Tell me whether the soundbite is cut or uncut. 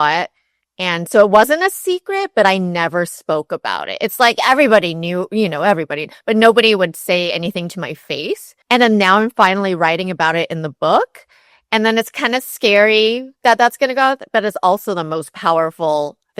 cut